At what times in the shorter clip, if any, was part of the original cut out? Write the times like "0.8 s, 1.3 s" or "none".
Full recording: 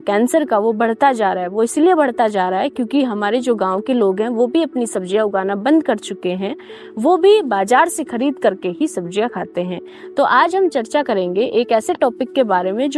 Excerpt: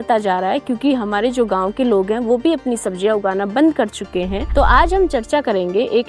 4.4 s